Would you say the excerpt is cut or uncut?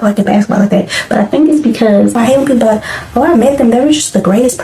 cut